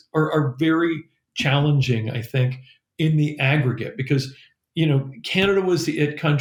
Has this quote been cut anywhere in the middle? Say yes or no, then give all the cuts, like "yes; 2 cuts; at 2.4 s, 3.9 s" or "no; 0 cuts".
no; 0 cuts